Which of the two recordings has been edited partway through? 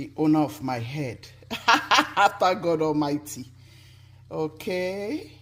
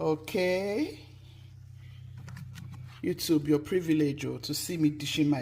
second; 1 cut; at 2.9 s

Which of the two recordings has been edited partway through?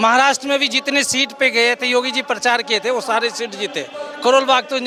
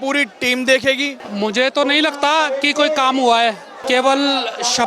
second; 2 cuts; at 1.2 s, 3.7 s

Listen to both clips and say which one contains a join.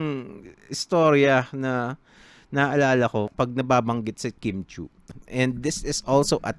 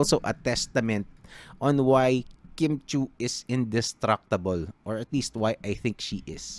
first; 2 cuts; at 3.3 s, 5.0 s

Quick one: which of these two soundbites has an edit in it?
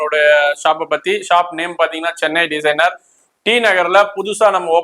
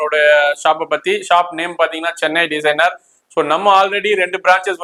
first; 1 cut; at 3.2 s

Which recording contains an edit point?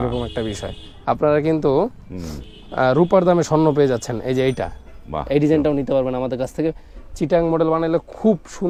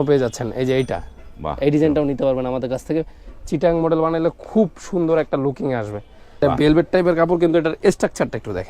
second; 1 cut; at 6.4 s

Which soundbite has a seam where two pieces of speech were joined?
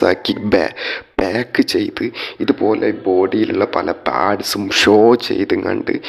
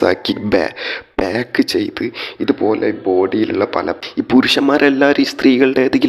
second; 1 cut; at 4.0 s

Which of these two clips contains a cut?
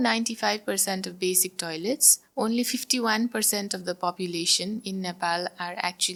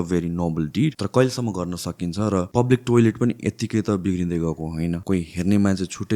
second; 3 cuts; at 1.0 s, 2.5 s, 5.0 s

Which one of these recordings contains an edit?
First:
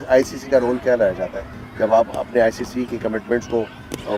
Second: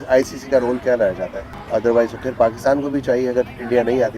second; 1 cut; at 1.5 s

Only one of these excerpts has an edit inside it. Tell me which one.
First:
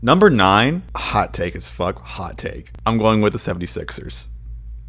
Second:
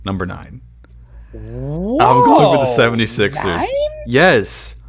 first; 2 cuts; at 0.9 s, 2.7 s

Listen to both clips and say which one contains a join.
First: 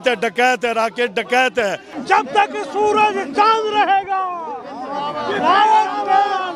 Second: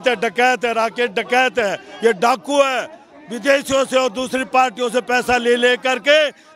first; 1 cut; at 1.9 s

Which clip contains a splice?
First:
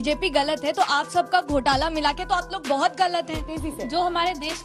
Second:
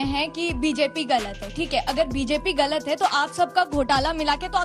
first; 1 cut; at 3.6 s

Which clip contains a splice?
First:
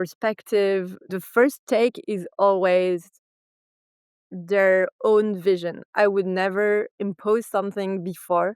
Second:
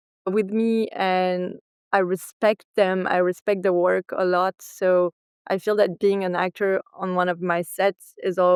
first; 1 cut; at 1.2 s

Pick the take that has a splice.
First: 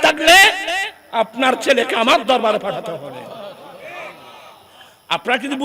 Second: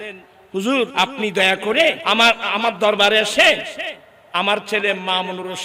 second; 2 cuts; at 0.9 s, 2.0 s

